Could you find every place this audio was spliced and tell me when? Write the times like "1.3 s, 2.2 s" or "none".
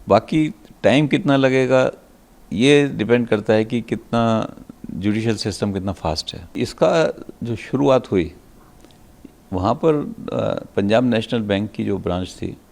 6.6 s